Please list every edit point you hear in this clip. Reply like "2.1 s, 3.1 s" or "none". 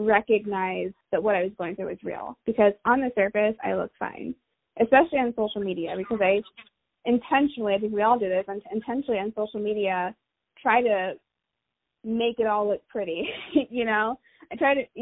1.0 s

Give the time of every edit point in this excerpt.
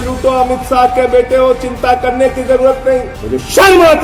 3.1 s

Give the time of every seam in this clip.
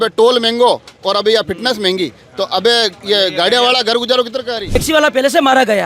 4.8 s

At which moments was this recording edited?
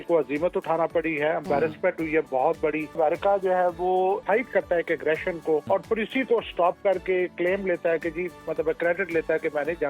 3.0 s, 4.2 s, 5.6 s

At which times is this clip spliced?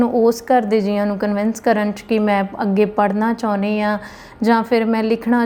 none

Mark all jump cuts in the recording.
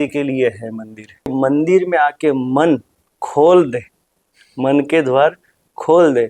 1.3 s

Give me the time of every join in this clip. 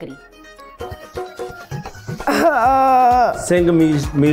none

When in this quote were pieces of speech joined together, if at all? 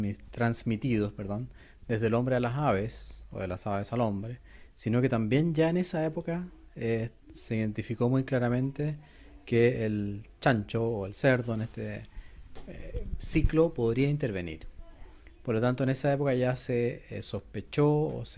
14.4 s

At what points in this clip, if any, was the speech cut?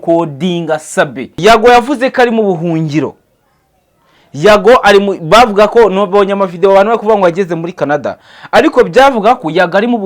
1.4 s

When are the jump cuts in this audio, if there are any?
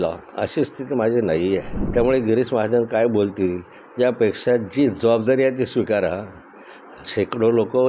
1.8 s

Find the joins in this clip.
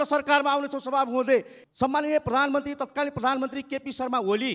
1.6 s

